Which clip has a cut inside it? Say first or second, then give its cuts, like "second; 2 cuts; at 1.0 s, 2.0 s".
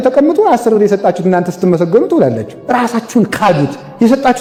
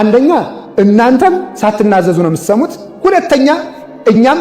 second; 2 cuts; at 1.5 s, 2.8 s